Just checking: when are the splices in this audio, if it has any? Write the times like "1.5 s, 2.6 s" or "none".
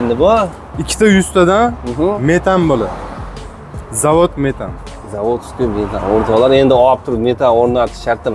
none